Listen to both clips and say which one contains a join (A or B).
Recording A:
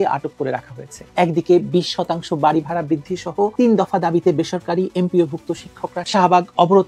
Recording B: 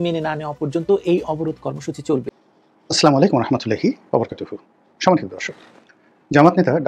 B